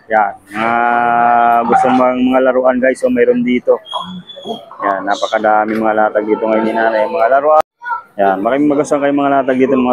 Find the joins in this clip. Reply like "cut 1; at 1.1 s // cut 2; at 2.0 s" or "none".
cut 1; at 7.6 s